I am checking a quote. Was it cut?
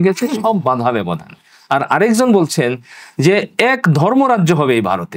no; 0 cuts

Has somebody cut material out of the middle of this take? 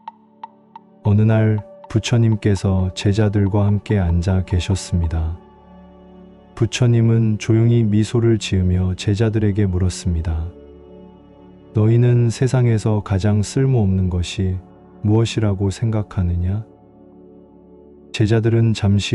yes; 1 cut; at 0.9 s

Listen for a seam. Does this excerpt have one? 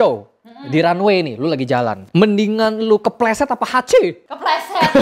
no; 0 cuts

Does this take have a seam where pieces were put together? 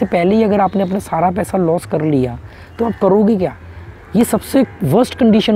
no; 0 cuts

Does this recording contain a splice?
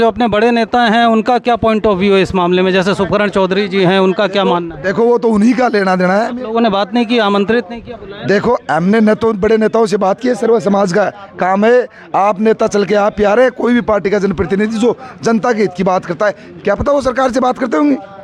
no; 0 cuts

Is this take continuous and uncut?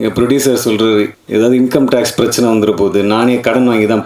no; 1 cut; at 1.2 s

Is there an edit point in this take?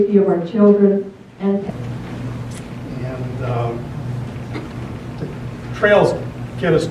no; 0 cuts

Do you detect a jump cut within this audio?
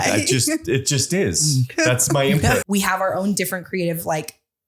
yes; 1 cut; at 2.6 s

